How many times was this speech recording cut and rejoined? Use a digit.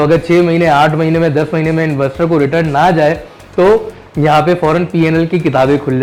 0